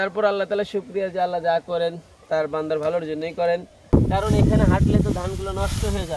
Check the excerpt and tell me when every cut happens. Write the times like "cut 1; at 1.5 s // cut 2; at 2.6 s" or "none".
cut 1; at 3.9 s